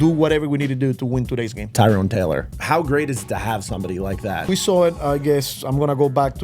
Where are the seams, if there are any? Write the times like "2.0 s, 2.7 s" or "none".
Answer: 1.7 s, 2.5 s, 4.5 s